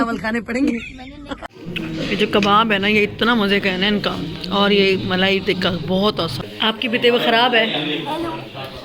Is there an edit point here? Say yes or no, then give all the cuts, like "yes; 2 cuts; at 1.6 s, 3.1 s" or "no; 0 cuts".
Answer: yes; 2 cuts; at 1.4 s, 6.5 s